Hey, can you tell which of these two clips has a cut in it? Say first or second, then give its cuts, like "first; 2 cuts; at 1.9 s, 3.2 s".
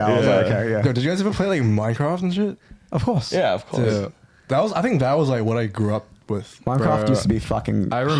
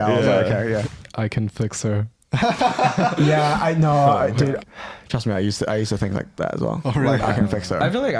second; 2 cuts; at 0.8 s, 4.7 s